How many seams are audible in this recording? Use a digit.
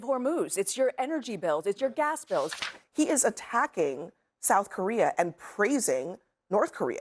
1